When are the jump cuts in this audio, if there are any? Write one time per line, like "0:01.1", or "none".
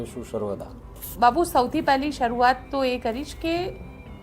0:01.0